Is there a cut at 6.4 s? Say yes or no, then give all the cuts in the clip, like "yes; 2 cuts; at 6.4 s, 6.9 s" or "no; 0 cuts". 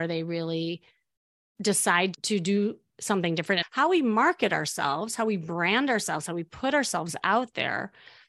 no; 1 cut; at 3.6 s